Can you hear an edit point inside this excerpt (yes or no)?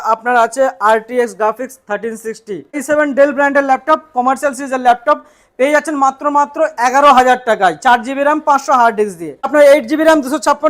yes